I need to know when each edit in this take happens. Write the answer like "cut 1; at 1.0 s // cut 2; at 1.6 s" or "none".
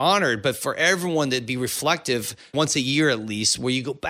cut 1; at 2.5 s

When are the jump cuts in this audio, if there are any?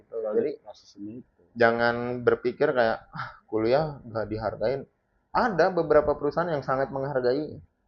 none

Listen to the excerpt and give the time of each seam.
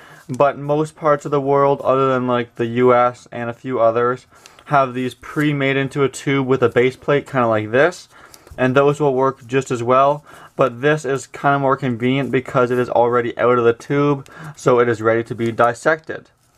none

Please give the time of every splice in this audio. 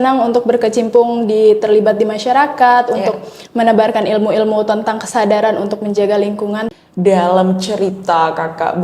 cut 1; at 6.7 s

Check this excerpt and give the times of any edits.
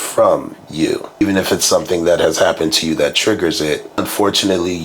cut 1; at 1.2 s // cut 2; at 4.0 s

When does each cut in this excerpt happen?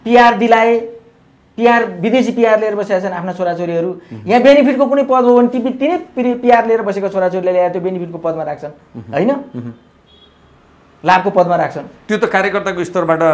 none

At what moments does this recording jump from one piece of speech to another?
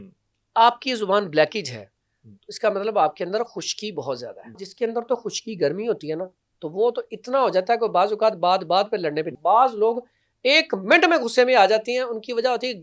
cut 1; at 4.6 s // cut 2; at 9.4 s

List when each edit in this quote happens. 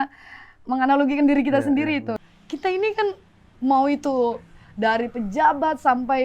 cut 1; at 2.2 s

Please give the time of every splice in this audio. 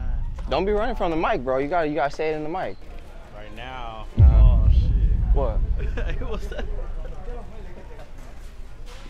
cut 1; at 2.8 s

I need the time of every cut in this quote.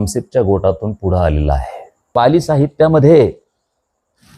cut 1; at 2.1 s

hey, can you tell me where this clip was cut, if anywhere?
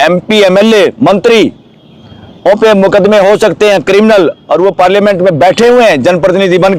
none

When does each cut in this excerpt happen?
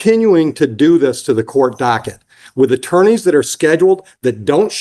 none

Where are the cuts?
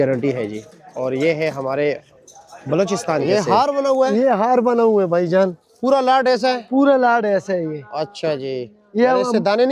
cut 1; at 3.2 s

